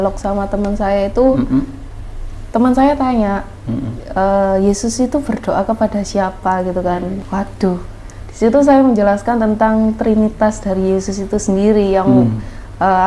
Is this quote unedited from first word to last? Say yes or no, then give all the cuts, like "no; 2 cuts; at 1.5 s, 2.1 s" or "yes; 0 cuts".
no; 1 cut; at 7.2 s